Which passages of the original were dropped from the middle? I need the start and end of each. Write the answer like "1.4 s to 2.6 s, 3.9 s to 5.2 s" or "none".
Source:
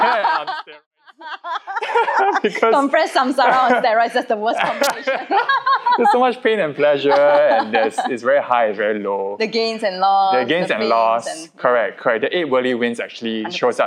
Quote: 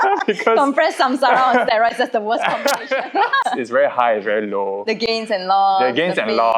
5.6 s to 8.0 s

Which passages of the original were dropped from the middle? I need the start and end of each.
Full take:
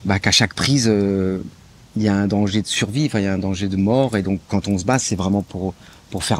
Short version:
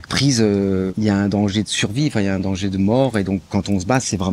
1.4 s to 1.9 s

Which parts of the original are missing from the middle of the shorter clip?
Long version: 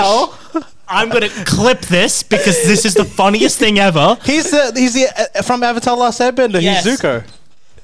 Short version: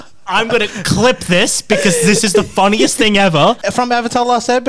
4.2 s to 5.3 s

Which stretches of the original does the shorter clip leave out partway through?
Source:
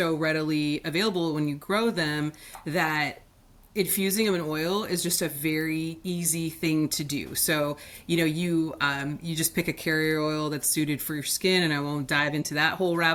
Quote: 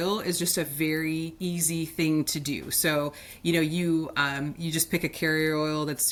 none

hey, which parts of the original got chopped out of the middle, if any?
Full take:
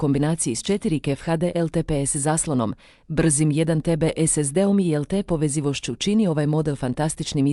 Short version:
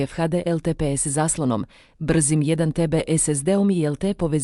none

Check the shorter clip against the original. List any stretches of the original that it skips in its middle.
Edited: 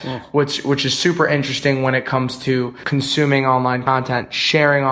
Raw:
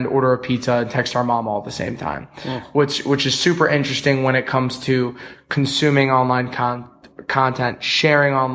5.2 s to 5.4 s, 6.5 s to 7.3 s

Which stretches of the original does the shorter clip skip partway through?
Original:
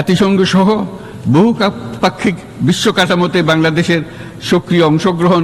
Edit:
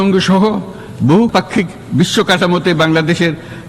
1.5 s to 2.0 s

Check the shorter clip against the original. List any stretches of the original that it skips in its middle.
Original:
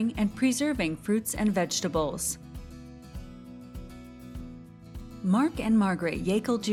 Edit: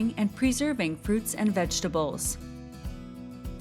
2.2 s to 2.5 s

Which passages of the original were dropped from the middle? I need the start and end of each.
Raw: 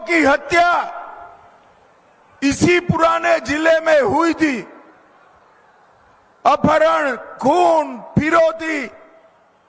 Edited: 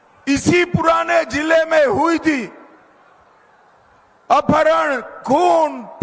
none

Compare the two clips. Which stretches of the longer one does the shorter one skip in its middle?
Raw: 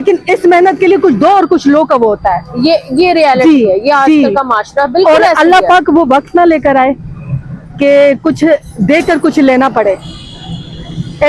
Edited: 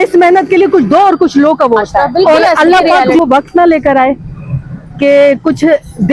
2.4 s to 4.9 s

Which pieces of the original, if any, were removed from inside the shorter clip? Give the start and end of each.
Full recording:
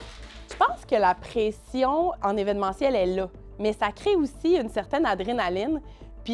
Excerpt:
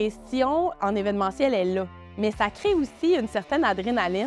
none

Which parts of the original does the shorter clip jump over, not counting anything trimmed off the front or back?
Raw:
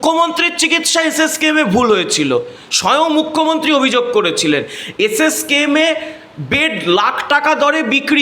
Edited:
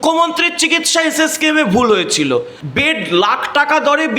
2.6 s to 6.4 s

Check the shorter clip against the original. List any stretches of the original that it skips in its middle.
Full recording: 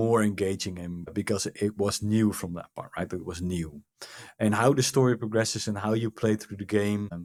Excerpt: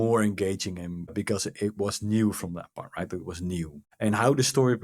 3.8 s to 4.2 s

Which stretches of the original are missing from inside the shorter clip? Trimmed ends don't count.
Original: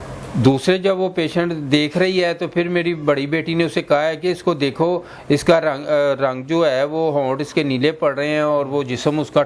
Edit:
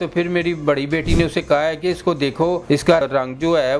5.3 s to 6.0 s

